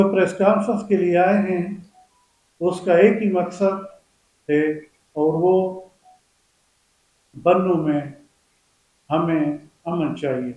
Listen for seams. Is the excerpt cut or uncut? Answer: uncut